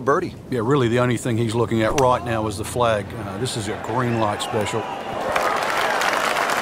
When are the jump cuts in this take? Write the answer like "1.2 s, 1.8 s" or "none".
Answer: 5.1 s